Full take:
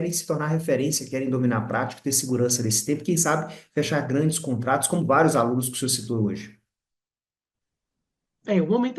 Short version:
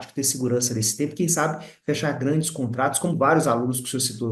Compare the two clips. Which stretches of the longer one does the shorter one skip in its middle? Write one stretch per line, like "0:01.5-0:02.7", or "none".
none